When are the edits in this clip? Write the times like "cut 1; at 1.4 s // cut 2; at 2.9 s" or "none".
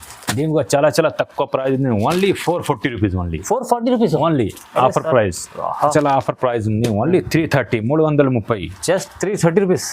cut 1; at 5.9 s